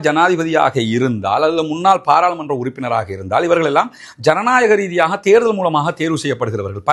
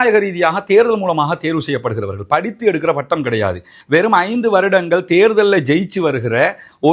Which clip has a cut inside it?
second; 1 cut; at 3.7 s

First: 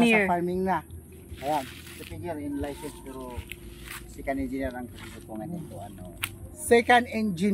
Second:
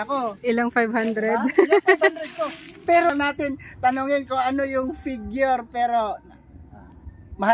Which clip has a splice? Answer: second; 1 cut; at 3.1 s

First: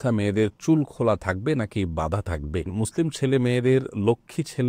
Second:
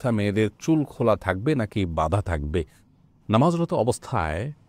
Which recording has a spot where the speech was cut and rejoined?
first; 1 cut; at 2.7 s

